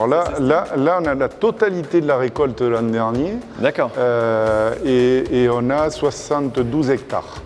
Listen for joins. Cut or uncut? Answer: uncut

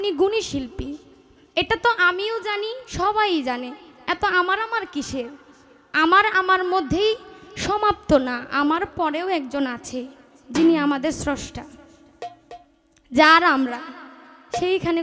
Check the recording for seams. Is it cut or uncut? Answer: uncut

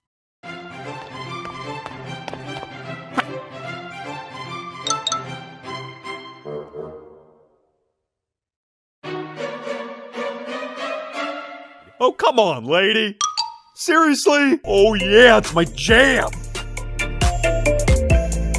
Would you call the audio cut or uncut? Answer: cut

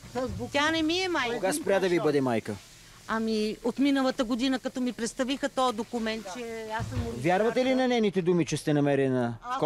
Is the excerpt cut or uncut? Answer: uncut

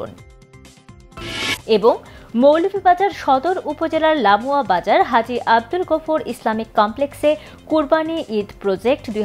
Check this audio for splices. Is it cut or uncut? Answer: uncut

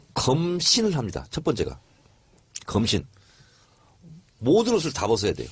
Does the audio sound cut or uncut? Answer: uncut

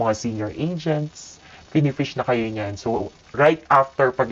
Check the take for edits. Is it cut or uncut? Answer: uncut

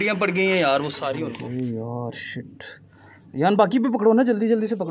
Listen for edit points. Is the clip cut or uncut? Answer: cut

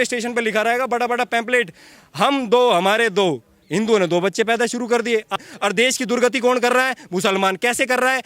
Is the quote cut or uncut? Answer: cut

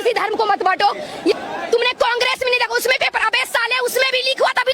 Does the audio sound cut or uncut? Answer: cut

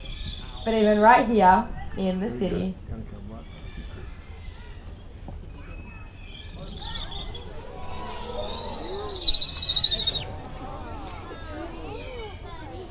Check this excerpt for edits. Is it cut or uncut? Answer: uncut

